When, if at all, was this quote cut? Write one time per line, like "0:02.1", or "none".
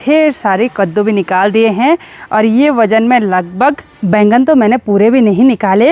0:03.9